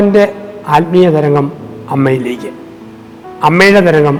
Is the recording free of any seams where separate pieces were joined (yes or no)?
yes